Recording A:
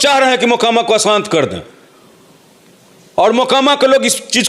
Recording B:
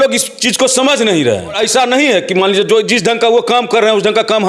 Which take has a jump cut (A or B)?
B